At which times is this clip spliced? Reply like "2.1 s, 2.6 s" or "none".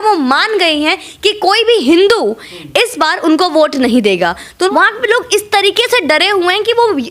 4.7 s